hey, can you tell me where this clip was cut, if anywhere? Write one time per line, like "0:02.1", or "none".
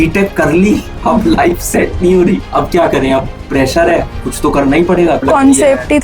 0:00.9
0:02.5
0:04.2
0:05.2